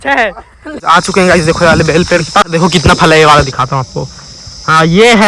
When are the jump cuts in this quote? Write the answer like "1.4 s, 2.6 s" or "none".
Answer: 0.8 s, 2.5 s